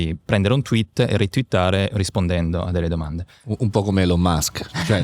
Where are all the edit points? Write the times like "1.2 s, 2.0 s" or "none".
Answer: 3.6 s